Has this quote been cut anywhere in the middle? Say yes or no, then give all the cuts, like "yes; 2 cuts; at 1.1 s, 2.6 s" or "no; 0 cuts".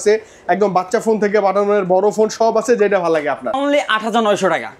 yes; 1 cut; at 3.6 s